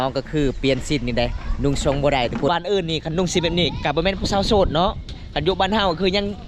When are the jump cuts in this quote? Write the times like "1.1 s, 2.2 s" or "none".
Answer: 2.5 s